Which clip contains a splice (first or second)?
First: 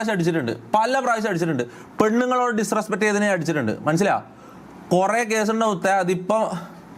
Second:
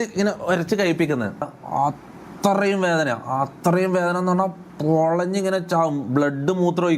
second